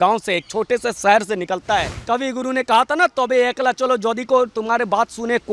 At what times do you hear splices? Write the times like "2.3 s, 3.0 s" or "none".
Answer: 1.9 s